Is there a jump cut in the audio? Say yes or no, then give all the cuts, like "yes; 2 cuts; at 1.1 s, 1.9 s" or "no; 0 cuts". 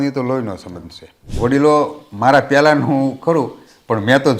yes; 1 cut; at 1.2 s